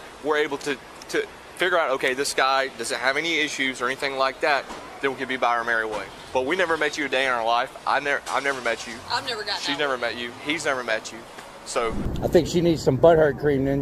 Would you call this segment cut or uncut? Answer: cut